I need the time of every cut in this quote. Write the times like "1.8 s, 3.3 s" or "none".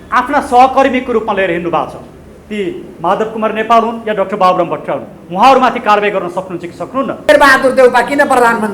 7.3 s